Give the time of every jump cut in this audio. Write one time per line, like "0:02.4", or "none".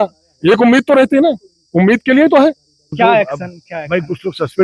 0:02.9